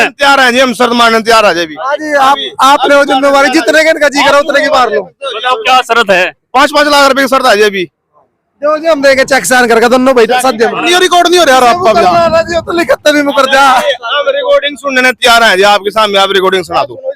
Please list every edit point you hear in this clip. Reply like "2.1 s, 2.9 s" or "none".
10.8 s